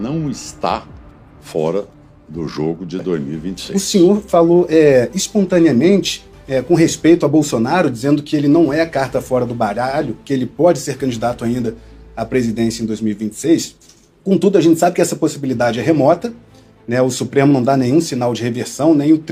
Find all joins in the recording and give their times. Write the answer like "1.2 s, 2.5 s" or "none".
3.6 s